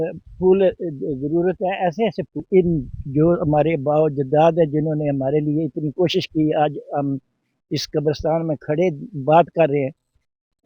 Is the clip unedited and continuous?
no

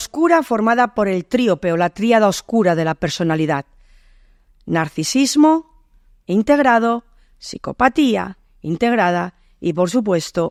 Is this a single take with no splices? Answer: yes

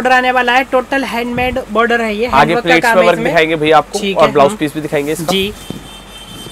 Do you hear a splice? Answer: no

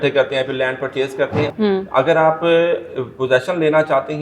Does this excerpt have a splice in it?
yes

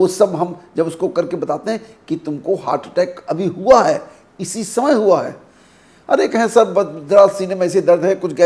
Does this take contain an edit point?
no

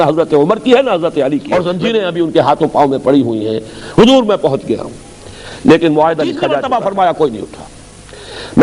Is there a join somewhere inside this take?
yes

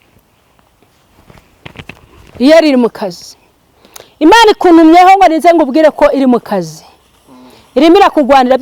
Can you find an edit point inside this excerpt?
no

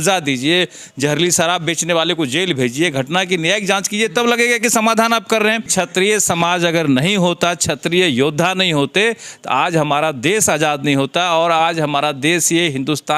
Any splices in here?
yes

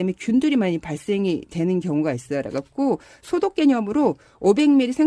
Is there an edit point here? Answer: no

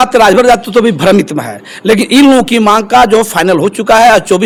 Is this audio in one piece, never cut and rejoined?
yes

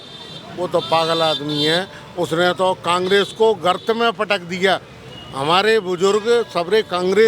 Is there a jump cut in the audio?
no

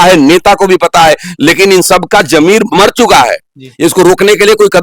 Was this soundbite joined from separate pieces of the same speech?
no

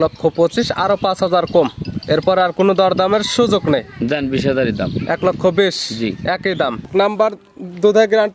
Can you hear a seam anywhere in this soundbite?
yes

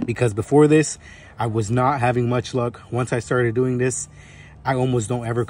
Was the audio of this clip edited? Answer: no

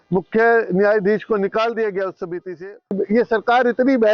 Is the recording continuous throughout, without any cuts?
no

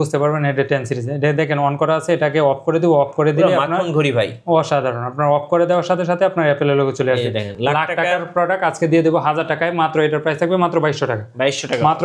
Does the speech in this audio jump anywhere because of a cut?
no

